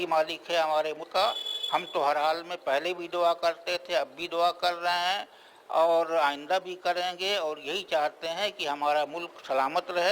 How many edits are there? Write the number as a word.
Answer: one